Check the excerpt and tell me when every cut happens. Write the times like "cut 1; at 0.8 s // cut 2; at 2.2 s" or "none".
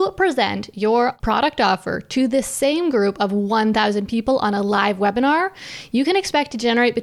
cut 1; at 1.2 s